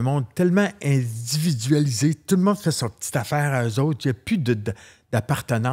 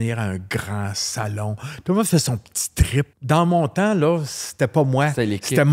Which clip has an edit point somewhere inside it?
second; 1 cut; at 3.2 s

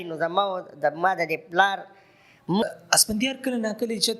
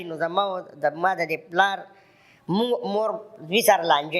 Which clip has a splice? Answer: first; 1 cut; at 2.6 s

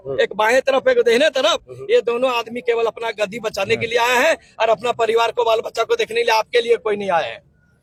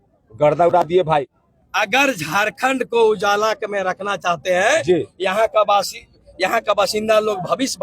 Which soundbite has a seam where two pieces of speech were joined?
second; 1 cut; at 1.4 s

